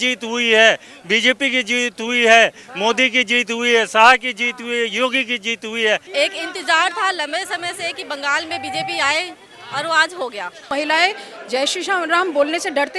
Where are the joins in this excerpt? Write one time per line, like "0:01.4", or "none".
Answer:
0:06.1
0:10.7